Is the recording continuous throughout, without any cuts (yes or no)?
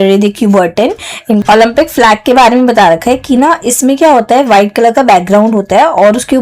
no